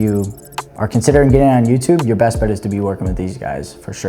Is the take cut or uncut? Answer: uncut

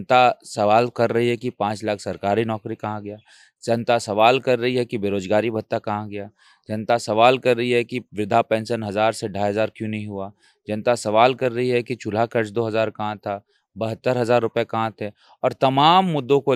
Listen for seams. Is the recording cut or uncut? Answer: uncut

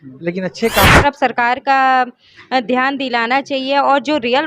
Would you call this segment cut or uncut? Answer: cut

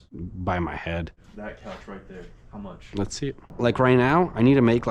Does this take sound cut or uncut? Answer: cut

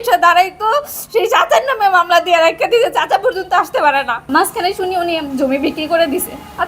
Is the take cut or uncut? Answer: cut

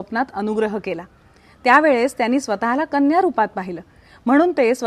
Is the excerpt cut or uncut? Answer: uncut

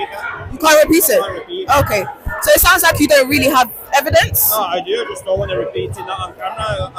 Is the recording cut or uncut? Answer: uncut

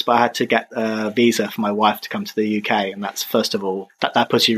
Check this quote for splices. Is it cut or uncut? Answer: uncut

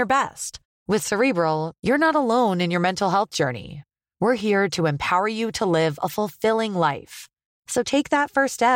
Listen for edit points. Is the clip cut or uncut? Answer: uncut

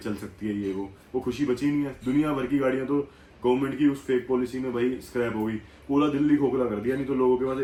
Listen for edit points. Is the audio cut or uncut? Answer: uncut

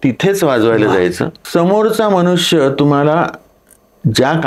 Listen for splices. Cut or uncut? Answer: cut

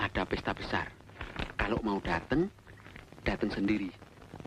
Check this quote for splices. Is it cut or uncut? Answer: uncut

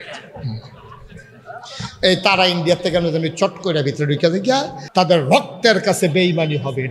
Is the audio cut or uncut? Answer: cut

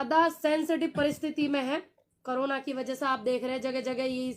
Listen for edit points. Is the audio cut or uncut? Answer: uncut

